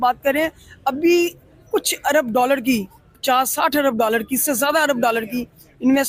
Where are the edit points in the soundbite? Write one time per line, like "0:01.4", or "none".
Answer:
none